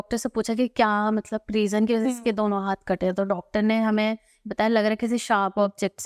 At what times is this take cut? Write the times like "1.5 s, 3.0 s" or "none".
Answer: none